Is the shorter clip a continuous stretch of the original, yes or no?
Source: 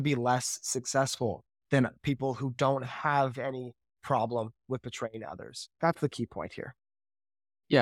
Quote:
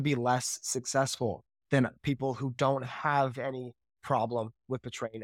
yes